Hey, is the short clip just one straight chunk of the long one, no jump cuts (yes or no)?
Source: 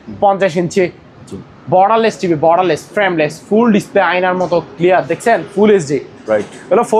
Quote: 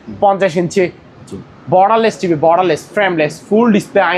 yes